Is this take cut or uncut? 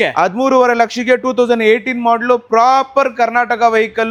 uncut